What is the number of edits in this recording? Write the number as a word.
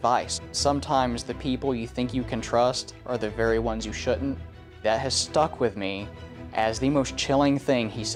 zero